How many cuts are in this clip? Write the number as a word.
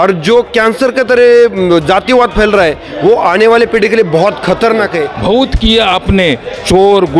one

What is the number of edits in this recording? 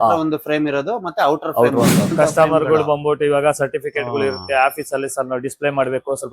one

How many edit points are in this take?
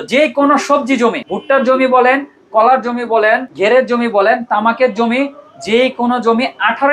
two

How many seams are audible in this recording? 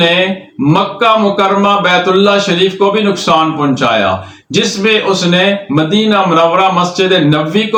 zero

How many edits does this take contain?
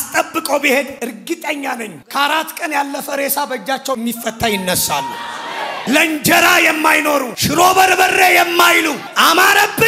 four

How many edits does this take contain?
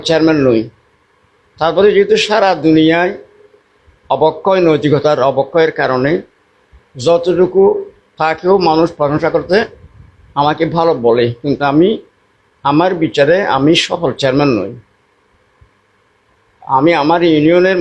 zero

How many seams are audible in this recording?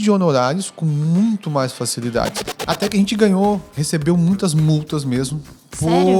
one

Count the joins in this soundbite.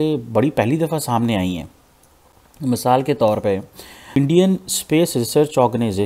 one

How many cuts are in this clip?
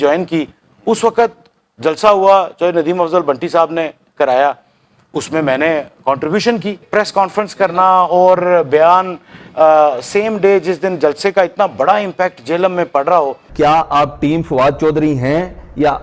two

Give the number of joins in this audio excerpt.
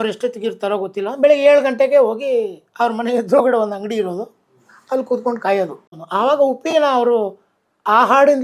one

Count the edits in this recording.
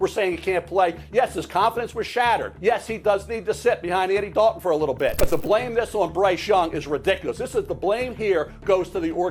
two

